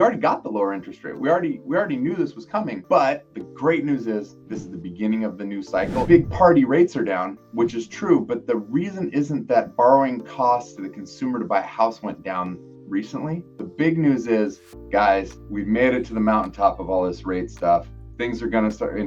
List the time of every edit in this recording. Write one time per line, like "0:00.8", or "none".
0:06.0